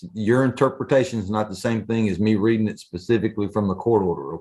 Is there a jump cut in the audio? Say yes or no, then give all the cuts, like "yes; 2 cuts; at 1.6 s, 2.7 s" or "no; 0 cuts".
no; 0 cuts